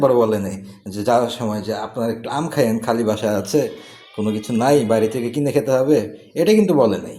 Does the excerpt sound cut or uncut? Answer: uncut